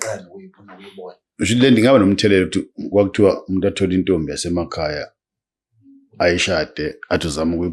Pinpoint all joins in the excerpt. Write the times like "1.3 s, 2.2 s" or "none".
none